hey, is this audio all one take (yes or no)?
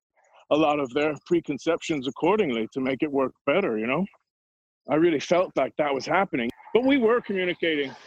no